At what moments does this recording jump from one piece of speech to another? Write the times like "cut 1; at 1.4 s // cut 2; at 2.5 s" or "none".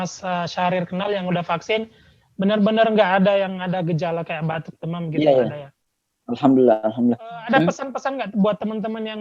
cut 1; at 7.5 s

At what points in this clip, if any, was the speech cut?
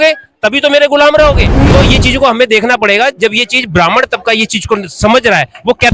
cut 1; at 1.6 s

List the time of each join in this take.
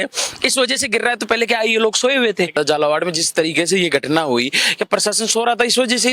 cut 1; at 2.5 s

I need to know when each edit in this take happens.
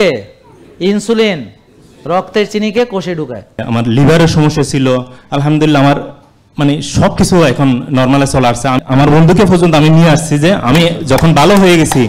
cut 1; at 3.6 s // cut 2; at 8.8 s

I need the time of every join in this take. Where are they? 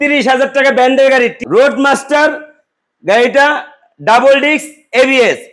cut 1; at 1.5 s

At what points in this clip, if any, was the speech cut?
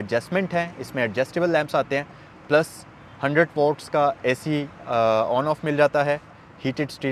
none

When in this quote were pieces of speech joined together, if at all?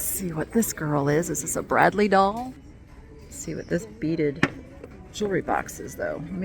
cut 1; at 2.6 s

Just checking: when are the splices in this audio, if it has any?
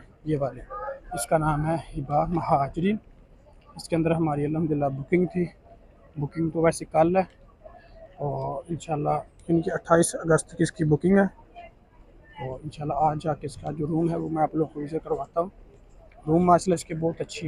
none

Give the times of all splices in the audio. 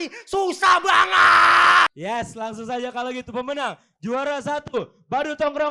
cut 1; at 1.9 s

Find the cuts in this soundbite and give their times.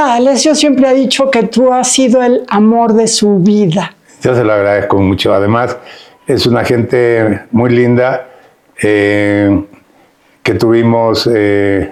none

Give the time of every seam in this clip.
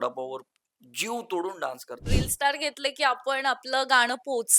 cut 1; at 2.1 s

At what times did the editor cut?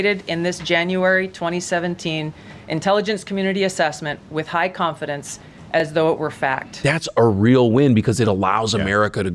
cut 1; at 6.7 s

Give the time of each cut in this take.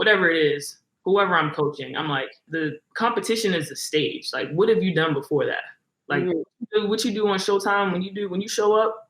cut 1; at 2.4 s

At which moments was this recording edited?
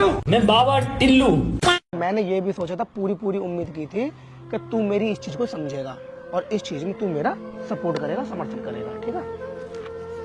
none

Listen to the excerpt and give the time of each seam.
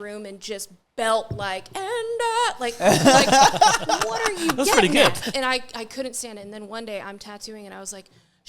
cut 1; at 5.2 s

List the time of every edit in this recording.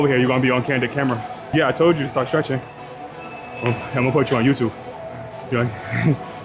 cut 1; at 1.5 s

